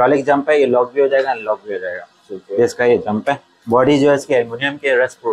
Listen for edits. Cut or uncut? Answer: uncut